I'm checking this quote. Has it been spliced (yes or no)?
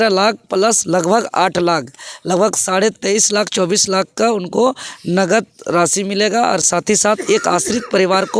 no